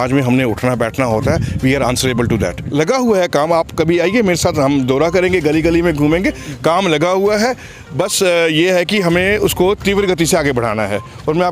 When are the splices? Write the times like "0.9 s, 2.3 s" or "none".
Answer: 2.9 s